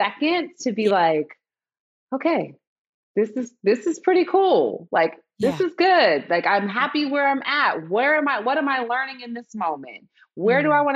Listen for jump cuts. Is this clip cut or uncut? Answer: uncut